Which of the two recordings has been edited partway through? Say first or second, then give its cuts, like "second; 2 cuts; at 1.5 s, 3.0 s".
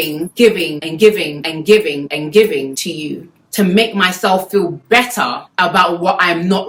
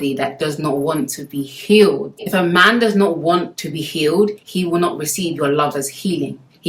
second; 1 cut; at 2.2 s